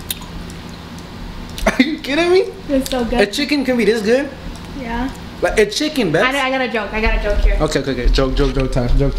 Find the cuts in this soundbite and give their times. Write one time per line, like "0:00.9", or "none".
none

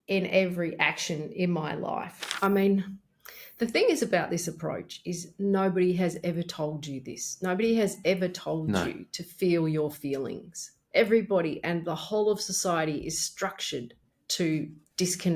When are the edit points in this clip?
0:02.2

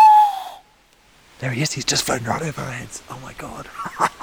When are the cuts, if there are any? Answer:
none

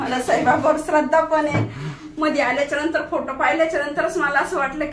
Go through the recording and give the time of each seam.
none

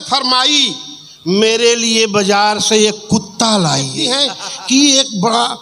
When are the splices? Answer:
0:04.0

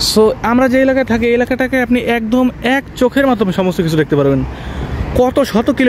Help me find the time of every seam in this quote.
none

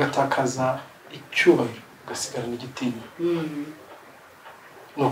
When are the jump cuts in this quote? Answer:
none

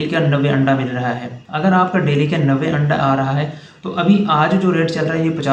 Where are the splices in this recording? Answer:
none

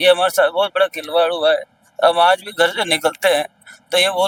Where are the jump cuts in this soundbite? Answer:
none

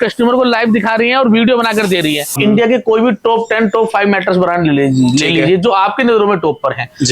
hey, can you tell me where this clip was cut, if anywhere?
0:02.4

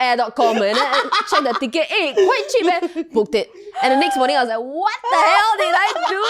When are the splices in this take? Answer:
none

